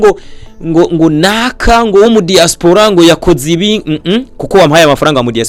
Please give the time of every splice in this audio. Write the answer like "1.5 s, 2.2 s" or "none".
none